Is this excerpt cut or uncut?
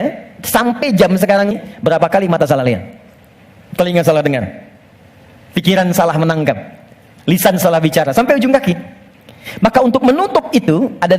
cut